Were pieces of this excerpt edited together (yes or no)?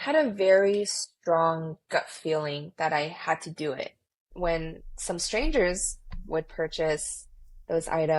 yes